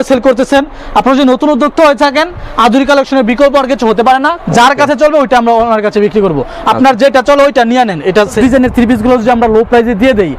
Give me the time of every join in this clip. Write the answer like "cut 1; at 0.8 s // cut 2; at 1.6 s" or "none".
cut 1; at 4.4 s // cut 2; at 8.4 s